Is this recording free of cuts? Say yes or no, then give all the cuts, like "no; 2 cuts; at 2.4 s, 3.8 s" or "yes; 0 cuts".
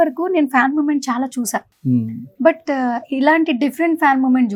yes; 0 cuts